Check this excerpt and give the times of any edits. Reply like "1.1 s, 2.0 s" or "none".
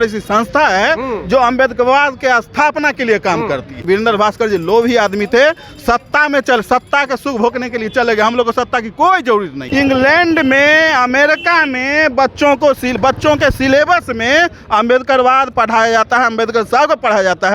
3.8 s, 9.6 s